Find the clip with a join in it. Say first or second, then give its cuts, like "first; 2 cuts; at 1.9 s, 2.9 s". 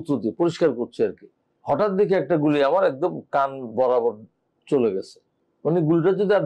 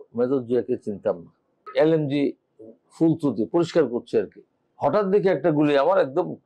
second; 1 cut; at 1.7 s